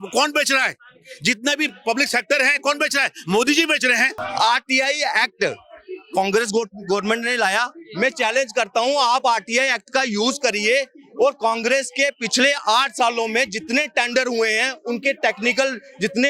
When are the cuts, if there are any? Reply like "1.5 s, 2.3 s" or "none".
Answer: 4.2 s